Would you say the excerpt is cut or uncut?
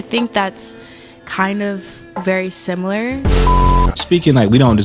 cut